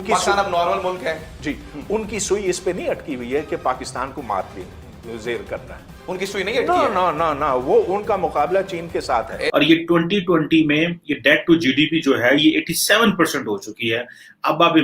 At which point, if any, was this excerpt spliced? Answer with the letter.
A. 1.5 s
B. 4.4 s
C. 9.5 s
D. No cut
C